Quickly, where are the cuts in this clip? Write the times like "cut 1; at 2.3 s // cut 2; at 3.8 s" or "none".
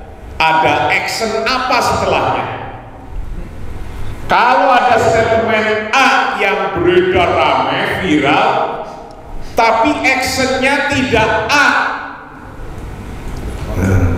none